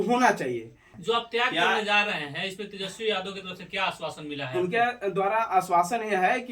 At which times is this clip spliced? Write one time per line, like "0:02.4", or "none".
0:00.9